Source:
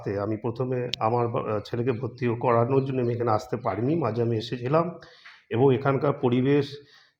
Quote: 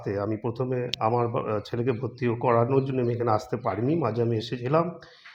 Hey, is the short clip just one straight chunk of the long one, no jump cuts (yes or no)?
yes